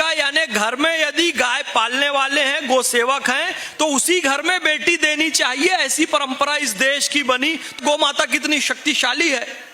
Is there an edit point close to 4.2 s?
no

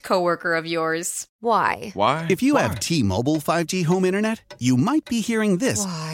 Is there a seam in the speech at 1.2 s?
yes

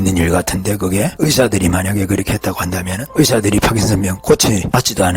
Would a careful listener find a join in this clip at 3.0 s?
yes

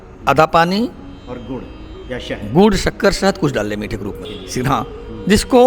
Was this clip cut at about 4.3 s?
yes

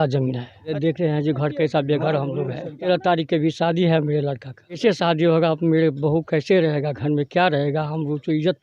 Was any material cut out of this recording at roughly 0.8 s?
yes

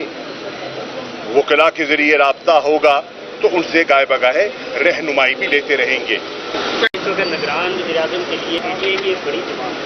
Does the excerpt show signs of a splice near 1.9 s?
no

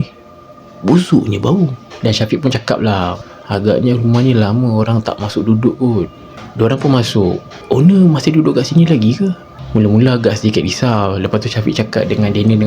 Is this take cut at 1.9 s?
no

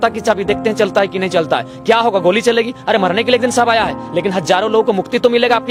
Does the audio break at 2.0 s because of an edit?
no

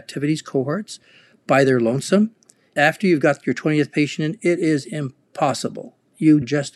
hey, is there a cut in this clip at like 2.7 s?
yes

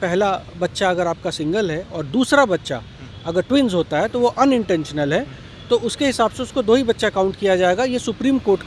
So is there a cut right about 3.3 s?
no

